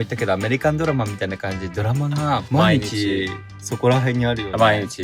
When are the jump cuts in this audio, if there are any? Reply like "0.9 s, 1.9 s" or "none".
2.4 s